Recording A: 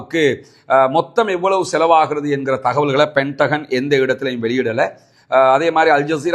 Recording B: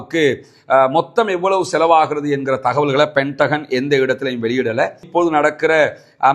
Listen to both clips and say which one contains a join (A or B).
B